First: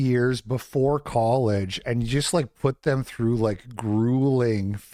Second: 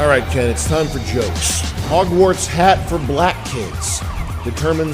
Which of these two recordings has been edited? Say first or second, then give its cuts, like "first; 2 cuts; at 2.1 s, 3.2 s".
second; 1 cut; at 2.1 s